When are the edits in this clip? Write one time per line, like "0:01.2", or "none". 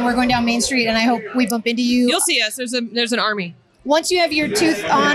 none